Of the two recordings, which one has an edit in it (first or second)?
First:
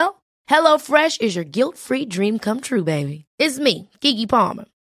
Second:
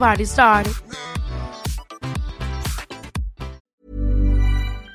second